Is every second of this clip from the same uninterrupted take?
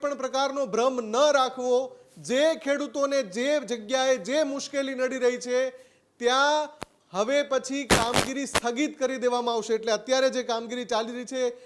yes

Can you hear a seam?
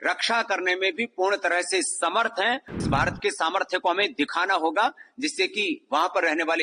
yes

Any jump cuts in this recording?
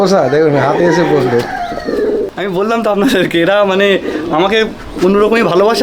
yes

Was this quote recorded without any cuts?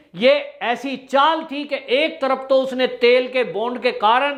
yes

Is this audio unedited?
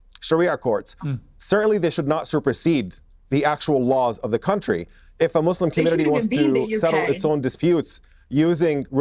yes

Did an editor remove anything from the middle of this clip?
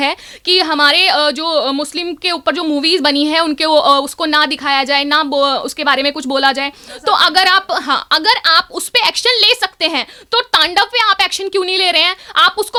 no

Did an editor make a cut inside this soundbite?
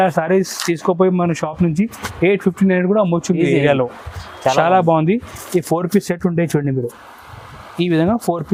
no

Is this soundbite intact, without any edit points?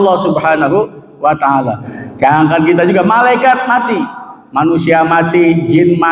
no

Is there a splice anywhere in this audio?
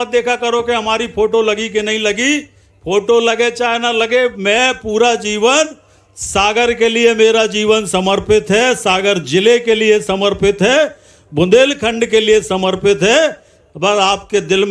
no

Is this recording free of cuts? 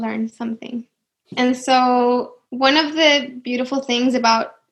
no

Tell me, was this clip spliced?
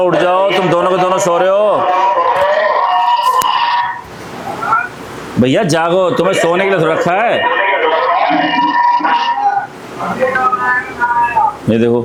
no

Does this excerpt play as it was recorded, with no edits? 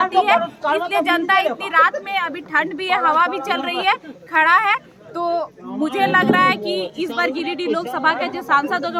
yes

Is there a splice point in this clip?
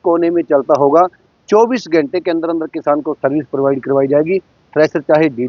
no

